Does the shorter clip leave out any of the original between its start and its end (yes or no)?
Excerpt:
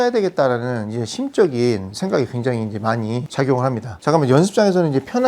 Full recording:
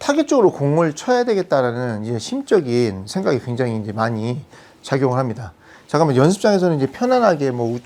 yes